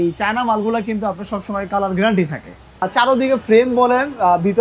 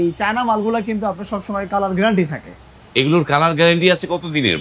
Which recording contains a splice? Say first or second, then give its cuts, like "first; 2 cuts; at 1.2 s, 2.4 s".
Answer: first; 1 cut; at 2.9 s